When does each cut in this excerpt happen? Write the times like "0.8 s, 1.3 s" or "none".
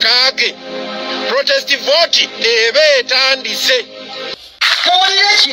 4.3 s